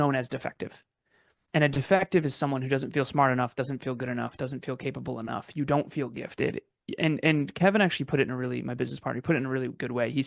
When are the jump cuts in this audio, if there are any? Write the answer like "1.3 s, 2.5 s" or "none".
none